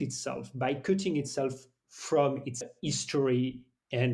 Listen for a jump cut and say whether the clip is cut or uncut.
cut